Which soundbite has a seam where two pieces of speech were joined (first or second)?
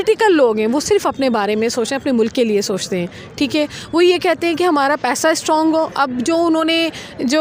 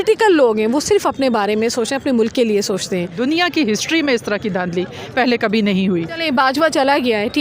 second